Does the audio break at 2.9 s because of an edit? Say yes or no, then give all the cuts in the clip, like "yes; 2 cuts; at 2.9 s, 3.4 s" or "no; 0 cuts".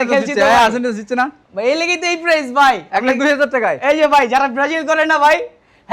no; 0 cuts